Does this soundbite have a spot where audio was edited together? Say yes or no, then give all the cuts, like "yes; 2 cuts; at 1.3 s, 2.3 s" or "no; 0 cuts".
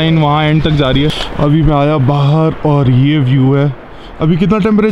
yes; 1 cut; at 1.1 s